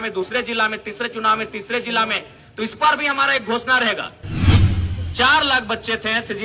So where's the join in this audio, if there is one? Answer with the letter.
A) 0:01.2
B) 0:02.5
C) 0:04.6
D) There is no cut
C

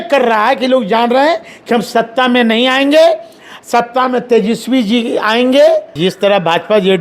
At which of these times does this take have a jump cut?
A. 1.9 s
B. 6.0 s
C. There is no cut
B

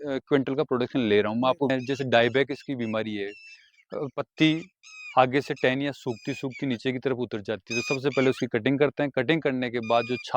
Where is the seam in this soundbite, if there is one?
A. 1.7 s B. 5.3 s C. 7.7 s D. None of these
A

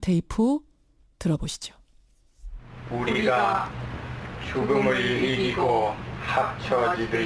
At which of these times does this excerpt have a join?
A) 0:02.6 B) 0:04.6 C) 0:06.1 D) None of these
A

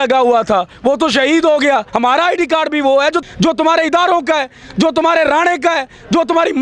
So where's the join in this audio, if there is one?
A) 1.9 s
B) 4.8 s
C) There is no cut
A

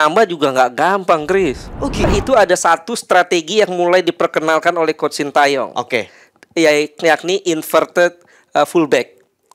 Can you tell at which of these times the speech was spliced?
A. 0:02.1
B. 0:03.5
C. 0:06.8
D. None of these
A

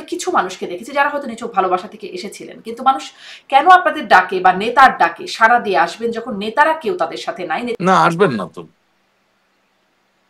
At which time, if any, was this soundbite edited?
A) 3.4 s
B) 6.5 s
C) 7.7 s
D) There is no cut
C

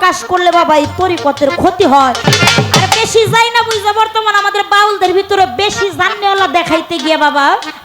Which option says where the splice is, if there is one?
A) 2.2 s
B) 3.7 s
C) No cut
A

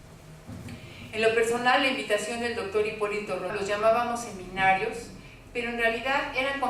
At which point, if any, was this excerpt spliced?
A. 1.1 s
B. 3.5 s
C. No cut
C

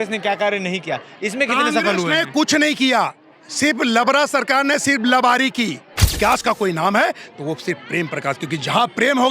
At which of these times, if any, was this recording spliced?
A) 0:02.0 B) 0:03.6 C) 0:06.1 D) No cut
C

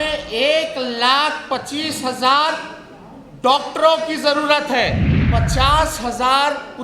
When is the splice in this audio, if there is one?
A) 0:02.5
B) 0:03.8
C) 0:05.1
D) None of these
C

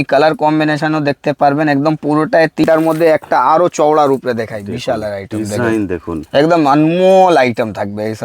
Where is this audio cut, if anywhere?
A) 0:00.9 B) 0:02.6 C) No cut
B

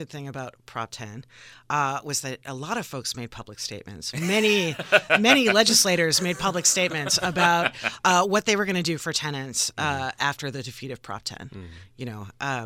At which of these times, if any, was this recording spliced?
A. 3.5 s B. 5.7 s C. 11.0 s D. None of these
D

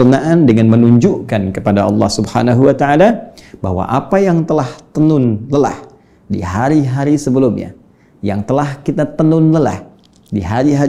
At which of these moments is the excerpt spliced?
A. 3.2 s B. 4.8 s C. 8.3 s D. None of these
D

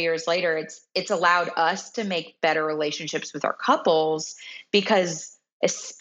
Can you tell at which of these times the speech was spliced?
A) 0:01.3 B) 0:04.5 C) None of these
C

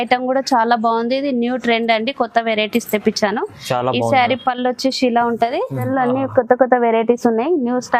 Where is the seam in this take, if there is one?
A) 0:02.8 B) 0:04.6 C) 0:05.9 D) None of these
C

